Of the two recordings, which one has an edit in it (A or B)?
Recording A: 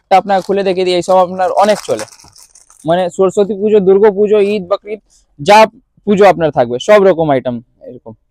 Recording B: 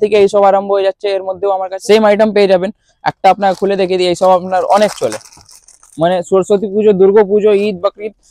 B